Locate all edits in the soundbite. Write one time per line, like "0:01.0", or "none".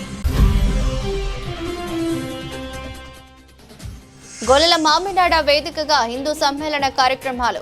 0:02.7
0:04.2

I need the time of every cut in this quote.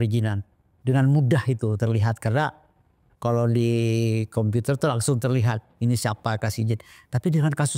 none

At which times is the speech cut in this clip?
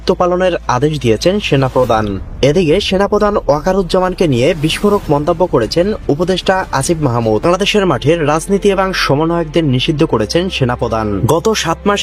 none

